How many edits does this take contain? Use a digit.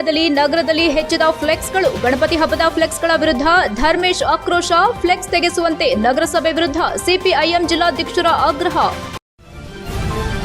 1